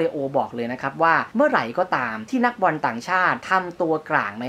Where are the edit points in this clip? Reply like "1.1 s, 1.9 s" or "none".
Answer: 1.3 s, 2.1 s, 3.4 s

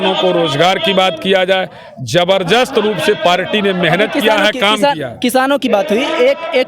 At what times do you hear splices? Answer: none

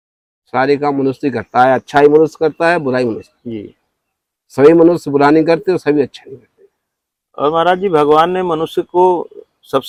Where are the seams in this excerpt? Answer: none

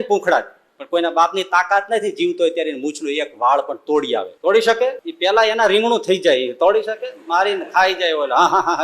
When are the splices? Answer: 4.3 s, 5.1 s

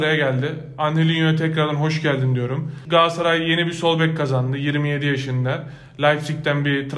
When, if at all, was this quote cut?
2.8 s

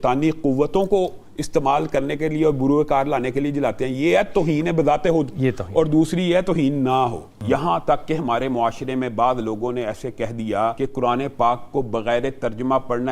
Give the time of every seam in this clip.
7.3 s, 10.8 s

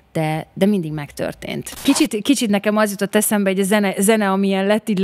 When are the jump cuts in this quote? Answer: 1.8 s

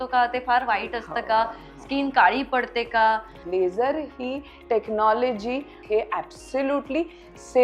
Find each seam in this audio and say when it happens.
3.4 s, 5.8 s

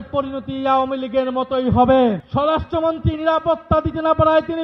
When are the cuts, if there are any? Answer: 2.2 s

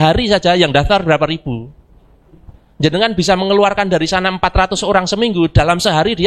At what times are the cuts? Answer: none

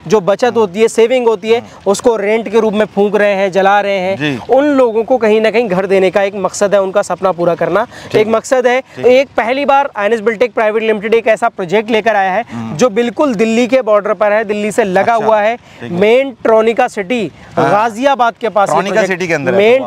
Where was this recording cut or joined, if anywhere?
8.9 s

